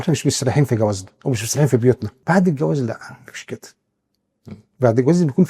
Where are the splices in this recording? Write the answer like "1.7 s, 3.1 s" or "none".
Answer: 2.1 s